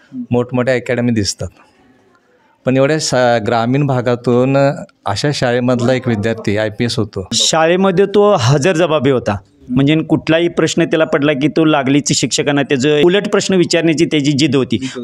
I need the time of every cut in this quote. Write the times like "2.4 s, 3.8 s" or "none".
7.4 s, 13.0 s